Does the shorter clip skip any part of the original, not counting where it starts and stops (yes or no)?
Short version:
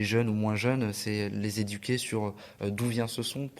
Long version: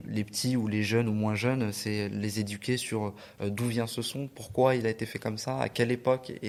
no